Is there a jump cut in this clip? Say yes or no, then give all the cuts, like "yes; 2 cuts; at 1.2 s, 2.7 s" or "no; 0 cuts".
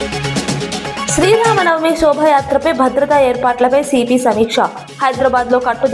yes; 1 cut; at 1.1 s